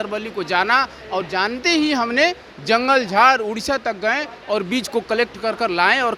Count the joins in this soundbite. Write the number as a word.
zero